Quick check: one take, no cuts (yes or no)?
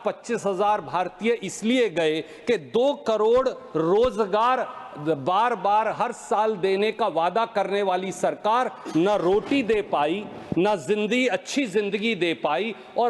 yes